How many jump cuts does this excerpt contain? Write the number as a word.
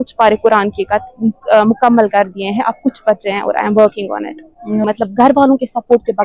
one